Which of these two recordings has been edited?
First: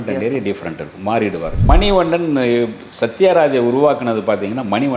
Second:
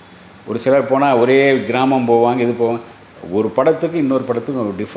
first; 1 cut; at 1.6 s

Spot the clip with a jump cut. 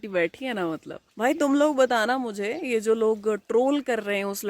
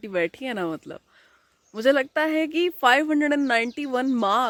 first; 1 cut; at 1.0 s

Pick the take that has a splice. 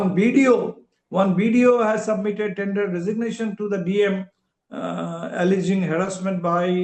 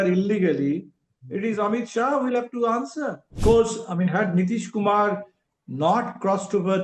second; 1 cut; at 3.3 s

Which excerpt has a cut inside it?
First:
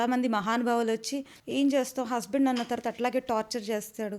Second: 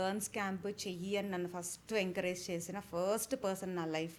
first; 1 cut; at 1.4 s

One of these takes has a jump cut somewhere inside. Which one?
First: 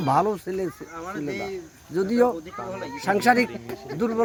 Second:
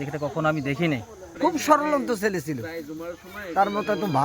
second; 1 cut; at 1.3 s

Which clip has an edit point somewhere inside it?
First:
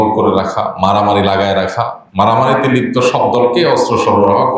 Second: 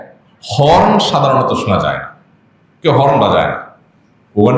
first; 1 cut; at 2.0 s

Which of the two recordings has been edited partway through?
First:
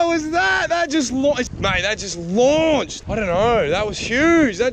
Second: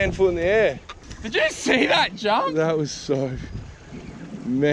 first; 2 cuts; at 1.4 s, 3.0 s

